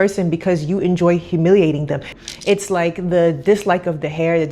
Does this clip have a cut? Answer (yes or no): yes